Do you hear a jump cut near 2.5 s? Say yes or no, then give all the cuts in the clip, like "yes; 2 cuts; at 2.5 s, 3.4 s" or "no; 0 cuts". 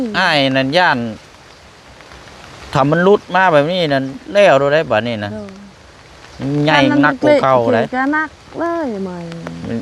no; 0 cuts